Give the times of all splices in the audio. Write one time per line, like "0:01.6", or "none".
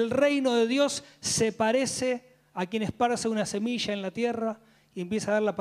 none